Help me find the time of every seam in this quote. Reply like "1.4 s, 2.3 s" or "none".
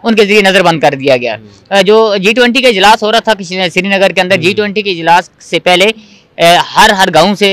none